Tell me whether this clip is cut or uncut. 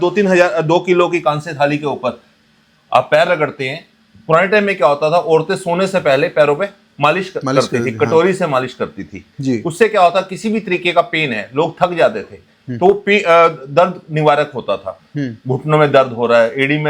uncut